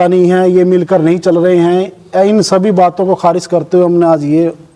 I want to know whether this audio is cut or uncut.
uncut